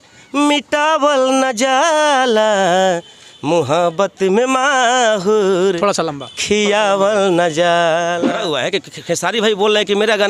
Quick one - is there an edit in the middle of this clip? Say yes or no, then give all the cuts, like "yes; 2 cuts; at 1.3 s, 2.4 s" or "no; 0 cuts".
yes; 1 cut; at 8.3 s